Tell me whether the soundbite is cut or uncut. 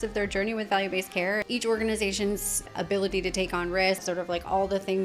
cut